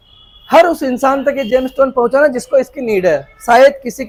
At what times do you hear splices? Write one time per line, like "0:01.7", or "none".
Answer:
none